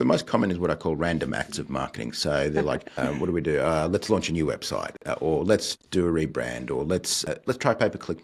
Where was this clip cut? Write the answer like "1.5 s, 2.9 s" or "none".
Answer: 3.0 s, 5.1 s, 7.3 s

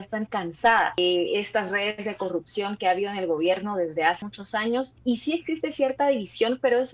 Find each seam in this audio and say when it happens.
1.0 s, 4.6 s

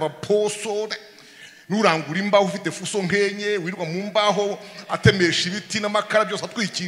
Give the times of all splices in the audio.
none

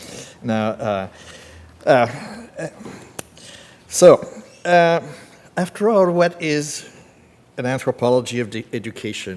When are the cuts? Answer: none

